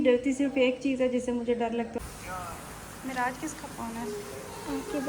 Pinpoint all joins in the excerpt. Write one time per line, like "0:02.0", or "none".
0:02.4